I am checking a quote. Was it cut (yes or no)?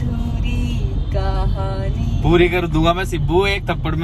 no